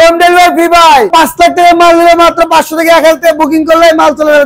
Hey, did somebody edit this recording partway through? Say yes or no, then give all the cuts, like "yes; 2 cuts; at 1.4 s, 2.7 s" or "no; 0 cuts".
no; 0 cuts